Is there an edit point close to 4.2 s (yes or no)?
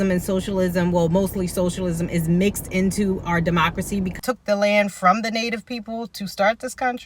yes